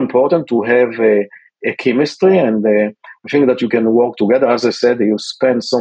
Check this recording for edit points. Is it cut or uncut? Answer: uncut